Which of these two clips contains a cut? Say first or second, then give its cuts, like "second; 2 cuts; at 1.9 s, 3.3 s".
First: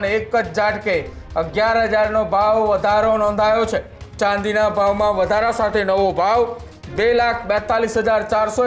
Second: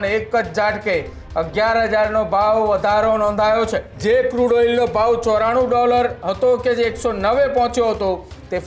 second; 1 cut; at 3.9 s